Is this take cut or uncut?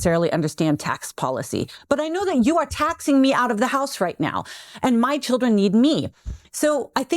uncut